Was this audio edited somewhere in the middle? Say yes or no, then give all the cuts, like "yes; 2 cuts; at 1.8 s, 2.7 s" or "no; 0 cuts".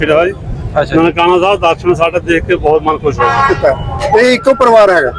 yes; 1 cut; at 3.5 s